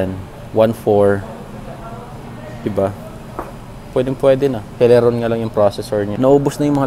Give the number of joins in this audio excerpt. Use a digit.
0